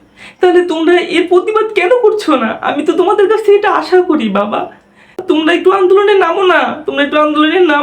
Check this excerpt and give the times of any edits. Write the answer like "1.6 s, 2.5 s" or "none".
5.2 s